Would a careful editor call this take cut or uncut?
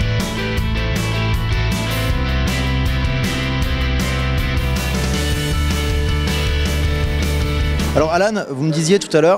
uncut